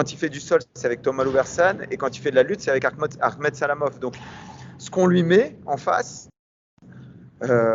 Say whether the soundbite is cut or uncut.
uncut